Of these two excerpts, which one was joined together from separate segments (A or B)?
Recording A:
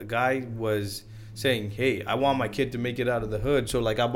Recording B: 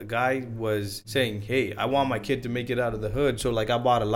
B